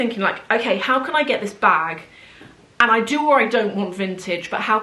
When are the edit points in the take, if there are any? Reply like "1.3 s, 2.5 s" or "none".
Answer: none